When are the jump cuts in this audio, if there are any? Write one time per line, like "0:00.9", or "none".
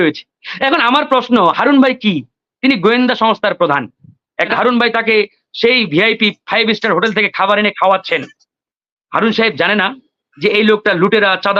0:04.5